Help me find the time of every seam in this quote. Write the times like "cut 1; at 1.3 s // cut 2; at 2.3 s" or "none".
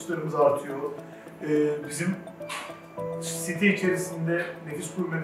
none